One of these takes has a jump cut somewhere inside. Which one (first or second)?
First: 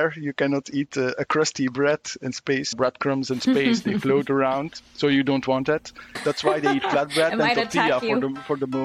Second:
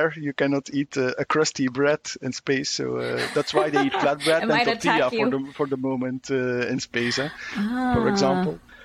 first